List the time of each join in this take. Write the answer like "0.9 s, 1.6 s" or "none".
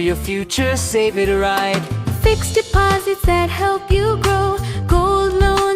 none